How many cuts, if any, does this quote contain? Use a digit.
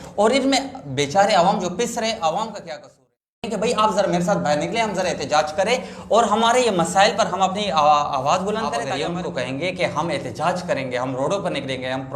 2